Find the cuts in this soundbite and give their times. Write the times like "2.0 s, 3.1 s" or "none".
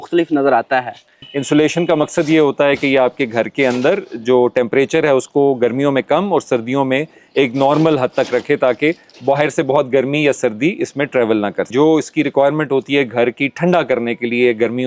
1.3 s, 11.7 s